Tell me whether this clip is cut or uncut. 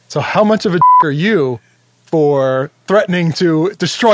uncut